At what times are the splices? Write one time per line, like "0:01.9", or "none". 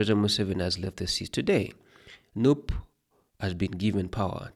none